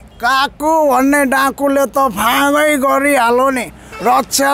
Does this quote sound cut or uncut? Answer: uncut